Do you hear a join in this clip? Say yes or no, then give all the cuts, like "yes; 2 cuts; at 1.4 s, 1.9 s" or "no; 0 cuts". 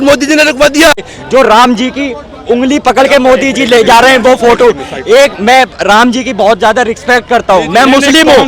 yes; 1 cut; at 1.1 s